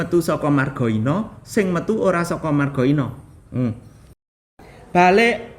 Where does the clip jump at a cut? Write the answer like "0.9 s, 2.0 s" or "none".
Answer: 4.2 s